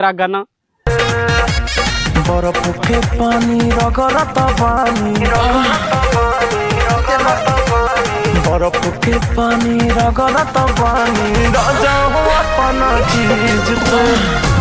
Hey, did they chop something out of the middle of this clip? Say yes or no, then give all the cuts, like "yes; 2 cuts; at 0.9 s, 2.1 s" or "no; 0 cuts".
no; 0 cuts